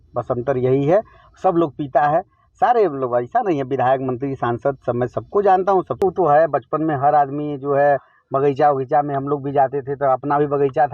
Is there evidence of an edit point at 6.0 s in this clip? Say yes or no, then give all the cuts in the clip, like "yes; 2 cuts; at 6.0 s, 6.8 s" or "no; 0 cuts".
yes; 1 cut; at 6.0 s